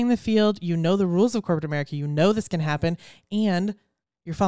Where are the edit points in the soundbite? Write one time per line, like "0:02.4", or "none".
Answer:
none